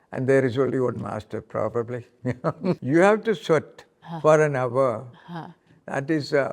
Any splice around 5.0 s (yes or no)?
no